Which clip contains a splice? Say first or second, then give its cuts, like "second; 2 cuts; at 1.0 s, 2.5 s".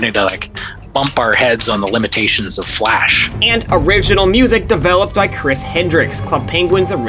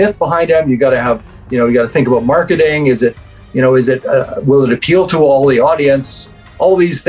first; 1 cut; at 3.2 s